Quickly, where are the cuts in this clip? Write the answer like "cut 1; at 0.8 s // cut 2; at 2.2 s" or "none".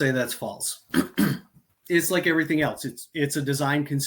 cut 1; at 1.8 s